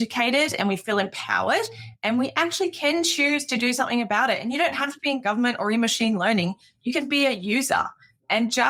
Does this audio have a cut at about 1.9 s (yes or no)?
no